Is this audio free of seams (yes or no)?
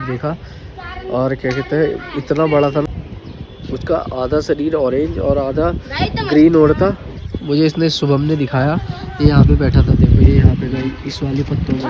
no